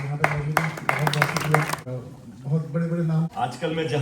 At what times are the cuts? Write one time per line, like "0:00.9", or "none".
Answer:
0:01.8
0:03.3